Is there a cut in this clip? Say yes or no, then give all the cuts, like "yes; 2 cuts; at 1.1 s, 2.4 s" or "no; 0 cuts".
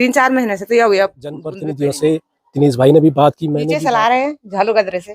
yes; 2 cuts; at 1.6 s, 3.7 s